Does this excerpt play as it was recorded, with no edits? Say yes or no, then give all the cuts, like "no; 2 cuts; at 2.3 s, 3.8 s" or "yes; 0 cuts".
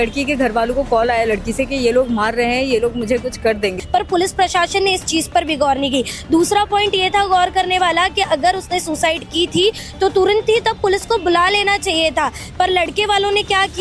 no; 1 cut; at 3.8 s